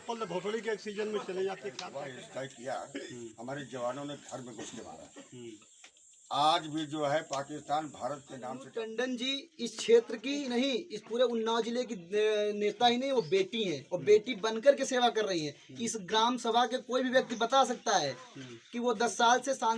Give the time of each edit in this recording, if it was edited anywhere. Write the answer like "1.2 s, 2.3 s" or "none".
1.8 s, 8.6 s